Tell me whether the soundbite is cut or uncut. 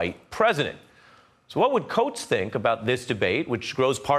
uncut